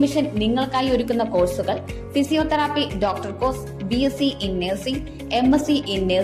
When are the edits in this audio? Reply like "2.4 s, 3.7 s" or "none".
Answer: none